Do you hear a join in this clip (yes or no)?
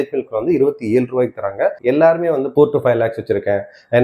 yes